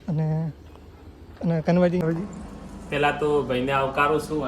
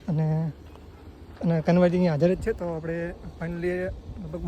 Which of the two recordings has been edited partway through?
first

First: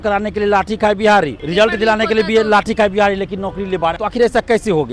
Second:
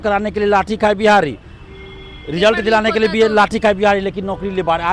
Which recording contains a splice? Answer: first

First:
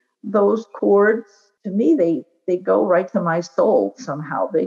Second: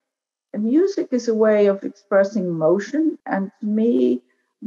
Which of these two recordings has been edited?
first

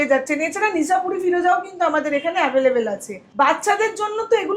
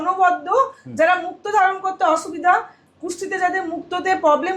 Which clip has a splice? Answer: first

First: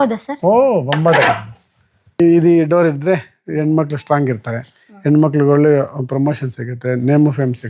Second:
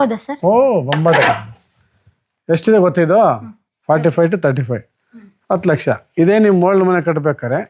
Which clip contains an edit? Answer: first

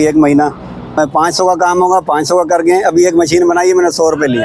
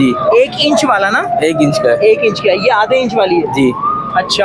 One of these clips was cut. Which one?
first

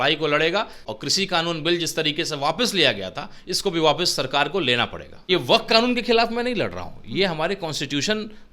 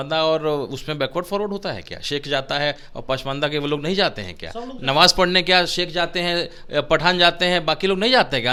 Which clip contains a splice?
first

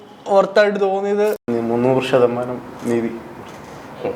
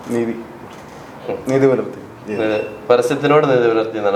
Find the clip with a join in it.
first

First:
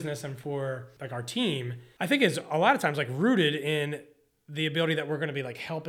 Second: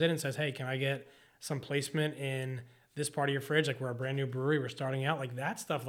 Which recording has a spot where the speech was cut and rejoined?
first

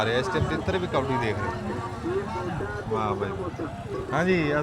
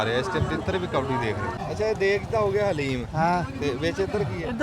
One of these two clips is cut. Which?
second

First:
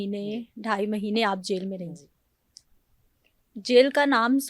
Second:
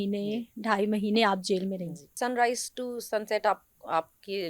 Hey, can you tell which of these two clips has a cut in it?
second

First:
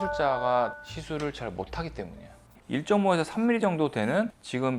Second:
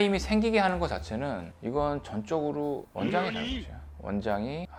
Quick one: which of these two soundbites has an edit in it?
first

